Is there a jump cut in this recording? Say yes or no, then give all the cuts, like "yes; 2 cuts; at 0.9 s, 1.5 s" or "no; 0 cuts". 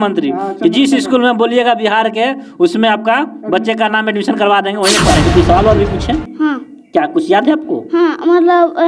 yes; 1 cut; at 5.2 s